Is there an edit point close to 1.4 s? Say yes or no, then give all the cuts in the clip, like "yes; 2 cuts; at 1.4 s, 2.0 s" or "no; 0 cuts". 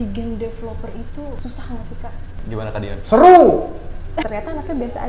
yes; 3 cuts; at 1.4 s, 2.3 s, 4.3 s